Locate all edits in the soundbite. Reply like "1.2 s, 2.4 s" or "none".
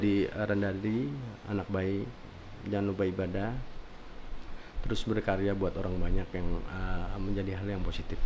none